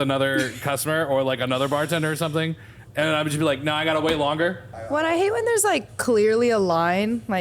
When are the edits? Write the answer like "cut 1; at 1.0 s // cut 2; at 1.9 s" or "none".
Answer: cut 1; at 4.8 s